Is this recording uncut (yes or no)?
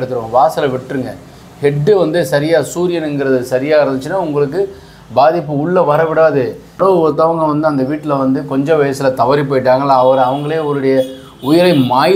no